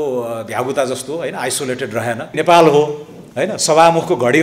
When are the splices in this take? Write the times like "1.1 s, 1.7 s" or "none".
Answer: 2.3 s

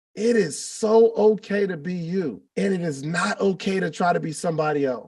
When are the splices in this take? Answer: 2.4 s

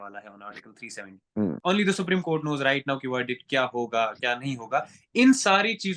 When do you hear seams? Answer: 1.6 s

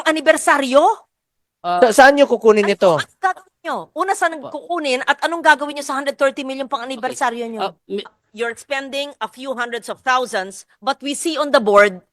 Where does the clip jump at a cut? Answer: 8.1 s

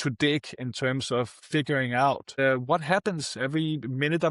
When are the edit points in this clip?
2.3 s

